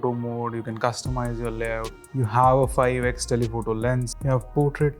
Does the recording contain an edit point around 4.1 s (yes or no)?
yes